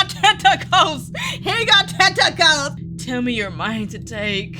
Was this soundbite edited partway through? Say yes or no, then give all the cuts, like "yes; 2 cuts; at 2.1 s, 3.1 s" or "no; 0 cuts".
yes; 1 cut; at 2.7 s